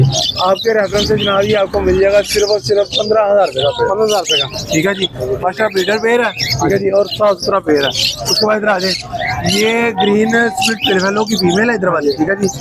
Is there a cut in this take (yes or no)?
no